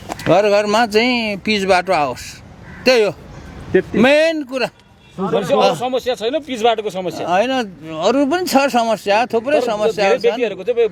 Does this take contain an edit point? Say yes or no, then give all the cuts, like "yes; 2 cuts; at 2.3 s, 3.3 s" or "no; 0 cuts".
no; 0 cuts